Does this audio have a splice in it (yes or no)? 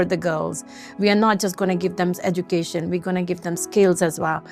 no